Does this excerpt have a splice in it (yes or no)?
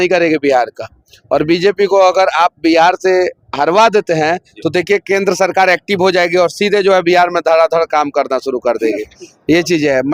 no